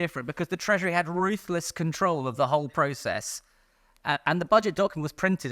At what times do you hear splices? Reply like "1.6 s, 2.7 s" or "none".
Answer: none